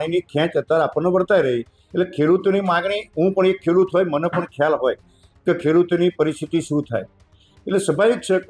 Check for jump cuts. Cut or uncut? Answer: cut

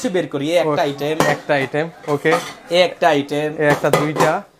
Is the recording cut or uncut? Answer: uncut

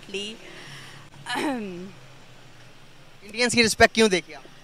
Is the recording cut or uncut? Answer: uncut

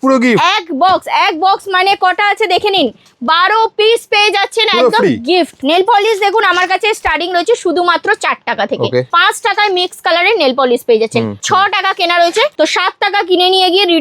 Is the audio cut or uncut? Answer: cut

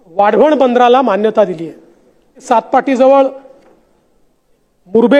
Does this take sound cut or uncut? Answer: cut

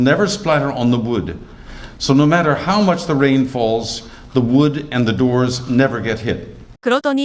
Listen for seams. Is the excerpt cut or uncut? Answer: uncut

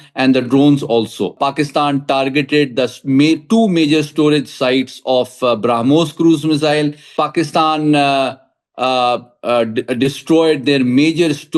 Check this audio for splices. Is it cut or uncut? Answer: cut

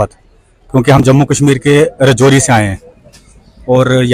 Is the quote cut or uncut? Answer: uncut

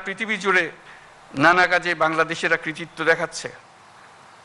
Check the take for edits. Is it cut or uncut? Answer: uncut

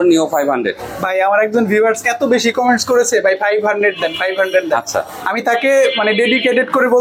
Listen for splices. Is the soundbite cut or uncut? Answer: uncut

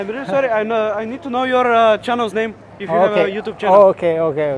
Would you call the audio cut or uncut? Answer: uncut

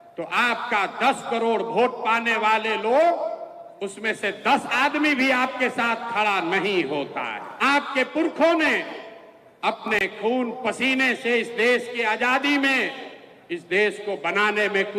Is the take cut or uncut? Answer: cut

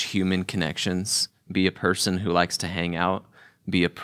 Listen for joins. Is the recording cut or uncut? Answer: uncut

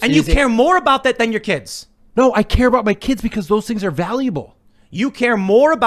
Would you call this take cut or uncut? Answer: cut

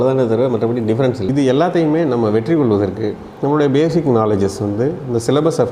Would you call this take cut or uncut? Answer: cut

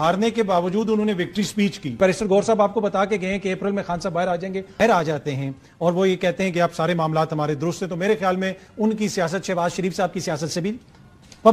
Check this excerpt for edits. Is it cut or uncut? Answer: cut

